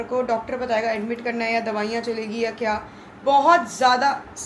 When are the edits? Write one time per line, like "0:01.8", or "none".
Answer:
none